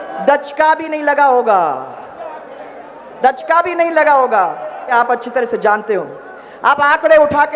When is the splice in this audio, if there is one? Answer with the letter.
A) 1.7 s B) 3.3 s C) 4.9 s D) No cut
C